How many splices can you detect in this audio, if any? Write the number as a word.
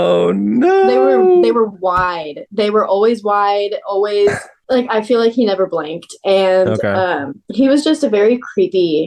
zero